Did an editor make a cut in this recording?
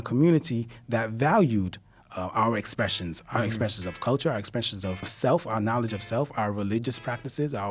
yes; 1 cut; at 5.1 s

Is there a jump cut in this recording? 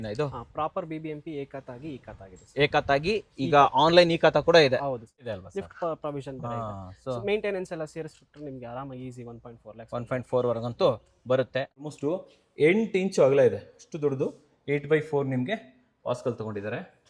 yes; 2 cuts; at 5.3 s, 11.8 s

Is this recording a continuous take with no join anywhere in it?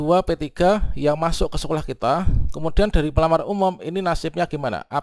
yes; 0 cuts

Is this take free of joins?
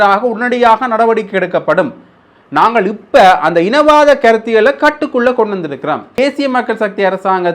no; 1 cut; at 6.2 s

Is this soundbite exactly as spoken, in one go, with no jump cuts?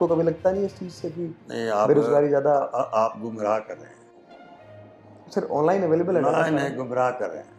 yes; 0 cuts

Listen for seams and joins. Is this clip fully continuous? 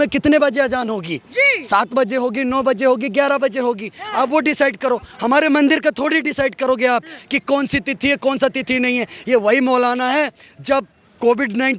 yes; 0 cuts

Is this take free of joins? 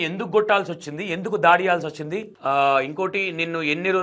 yes; 0 cuts

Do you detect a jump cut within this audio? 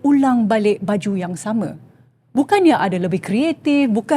no; 0 cuts

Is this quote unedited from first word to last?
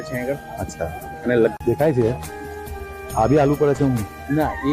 no; 1 cut; at 1.6 s

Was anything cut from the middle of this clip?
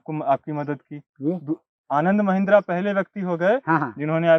no; 0 cuts

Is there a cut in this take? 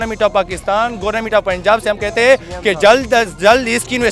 no; 0 cuts

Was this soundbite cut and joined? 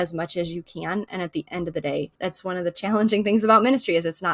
yes; 1 cut; at 2.1 s

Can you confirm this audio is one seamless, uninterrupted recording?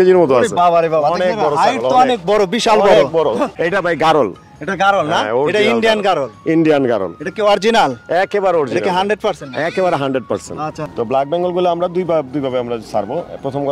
no; 2 cuts; at 3.5 s, 10.8 s

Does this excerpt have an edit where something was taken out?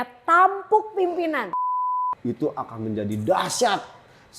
yes; 1 cut; at 1.7 s

